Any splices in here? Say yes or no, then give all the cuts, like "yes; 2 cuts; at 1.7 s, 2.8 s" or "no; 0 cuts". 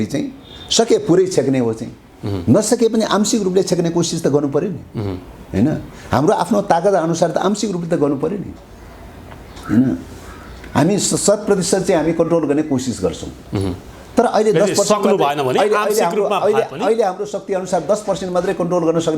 no; 0 cuts